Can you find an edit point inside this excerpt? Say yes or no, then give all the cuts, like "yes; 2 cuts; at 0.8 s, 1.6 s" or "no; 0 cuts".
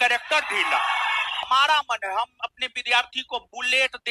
no; 0 cuts